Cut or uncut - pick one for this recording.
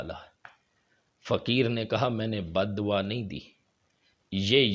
uncut